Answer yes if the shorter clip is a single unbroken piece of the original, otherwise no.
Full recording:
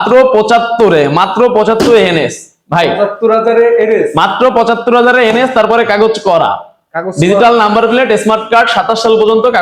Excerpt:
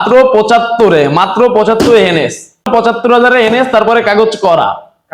no